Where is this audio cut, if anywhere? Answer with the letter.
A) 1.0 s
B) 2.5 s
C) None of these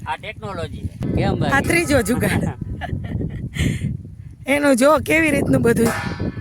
A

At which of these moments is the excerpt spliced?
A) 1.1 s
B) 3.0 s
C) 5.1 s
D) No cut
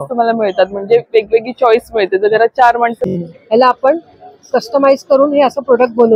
B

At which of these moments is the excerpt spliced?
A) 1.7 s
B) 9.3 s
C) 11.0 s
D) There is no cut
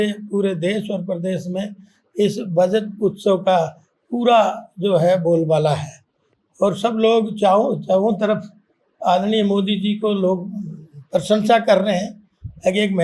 D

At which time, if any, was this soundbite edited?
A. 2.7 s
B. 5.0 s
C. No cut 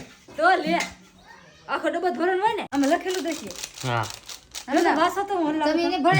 A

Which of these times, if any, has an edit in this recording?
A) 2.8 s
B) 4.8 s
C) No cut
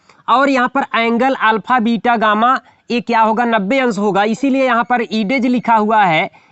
C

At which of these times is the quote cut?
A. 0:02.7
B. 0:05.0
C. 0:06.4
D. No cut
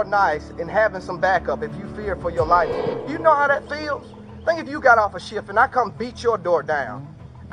A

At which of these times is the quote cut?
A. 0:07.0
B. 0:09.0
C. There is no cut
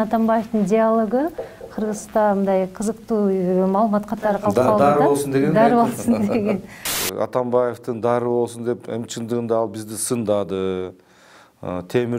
A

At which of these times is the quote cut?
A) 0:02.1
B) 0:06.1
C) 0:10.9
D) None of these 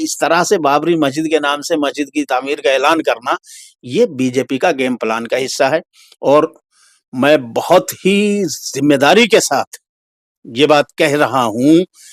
D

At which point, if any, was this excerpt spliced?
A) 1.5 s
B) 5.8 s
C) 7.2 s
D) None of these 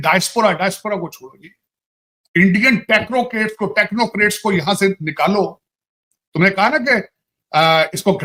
D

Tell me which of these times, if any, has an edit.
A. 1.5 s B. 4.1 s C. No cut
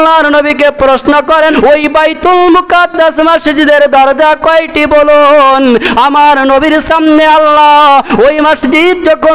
A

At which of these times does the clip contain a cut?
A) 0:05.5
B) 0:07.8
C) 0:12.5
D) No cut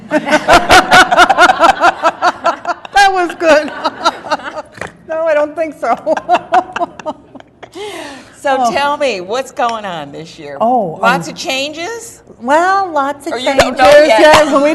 A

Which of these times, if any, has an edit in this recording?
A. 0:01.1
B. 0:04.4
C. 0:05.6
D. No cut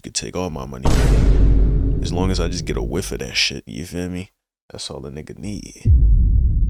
D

